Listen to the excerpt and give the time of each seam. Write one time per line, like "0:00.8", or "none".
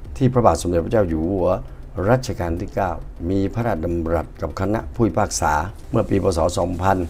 none